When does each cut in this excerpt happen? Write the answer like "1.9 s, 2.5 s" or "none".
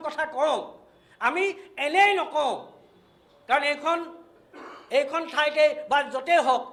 none